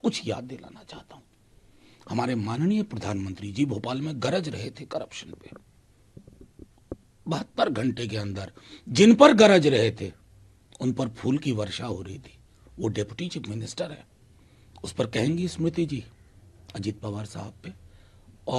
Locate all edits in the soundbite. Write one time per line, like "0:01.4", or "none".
none